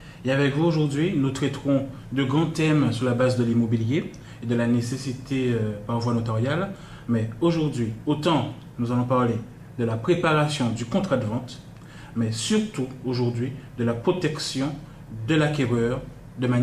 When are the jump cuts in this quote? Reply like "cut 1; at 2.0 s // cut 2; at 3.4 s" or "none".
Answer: none